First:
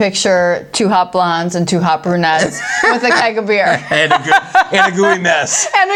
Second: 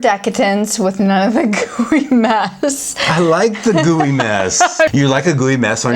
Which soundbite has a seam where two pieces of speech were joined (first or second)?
second